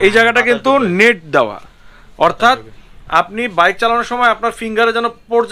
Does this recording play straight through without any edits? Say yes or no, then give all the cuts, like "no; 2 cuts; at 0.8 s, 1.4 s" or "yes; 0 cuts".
yes; 0 cuts